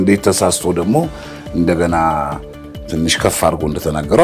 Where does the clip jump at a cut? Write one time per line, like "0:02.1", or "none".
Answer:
none